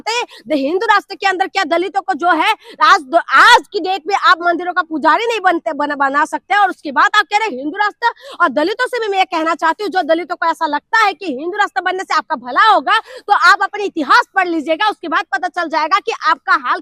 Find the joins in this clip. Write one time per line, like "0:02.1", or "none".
none